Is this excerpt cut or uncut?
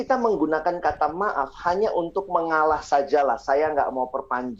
uncut